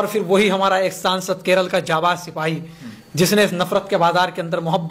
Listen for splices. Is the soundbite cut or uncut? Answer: uncut